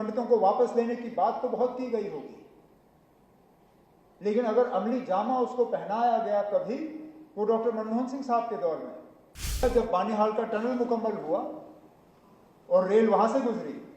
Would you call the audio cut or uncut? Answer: cut